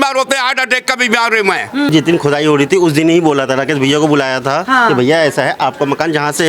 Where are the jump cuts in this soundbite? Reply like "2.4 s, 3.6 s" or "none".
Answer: 1.9 s